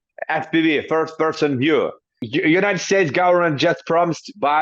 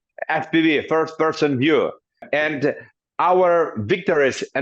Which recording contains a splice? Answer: first; 1 cut; at 2.2 s

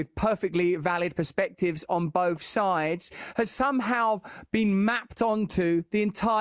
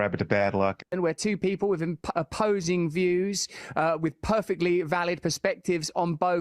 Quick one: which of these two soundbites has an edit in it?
second; 1 cut; at 0.9 s

